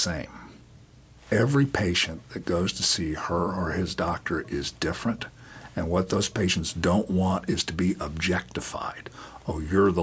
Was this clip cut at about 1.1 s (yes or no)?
yes